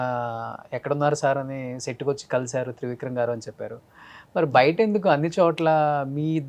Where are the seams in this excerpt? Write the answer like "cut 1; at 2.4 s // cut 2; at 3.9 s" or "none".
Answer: none